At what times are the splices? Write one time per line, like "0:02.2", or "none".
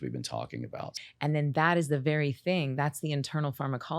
0:00.9